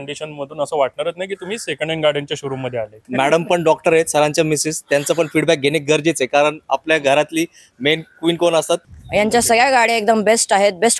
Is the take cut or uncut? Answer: cut